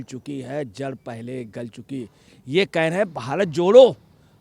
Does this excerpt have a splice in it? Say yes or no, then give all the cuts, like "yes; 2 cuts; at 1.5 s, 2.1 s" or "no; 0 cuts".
yes; 1 cut; at 2.4 s